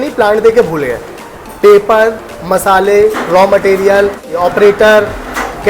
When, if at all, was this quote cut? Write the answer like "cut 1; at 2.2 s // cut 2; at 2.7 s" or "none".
cut 1; at 4.3 s